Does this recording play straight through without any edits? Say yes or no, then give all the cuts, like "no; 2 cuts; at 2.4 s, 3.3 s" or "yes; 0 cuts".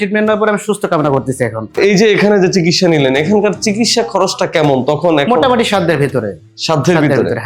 no; 1 cut; at 1.8 s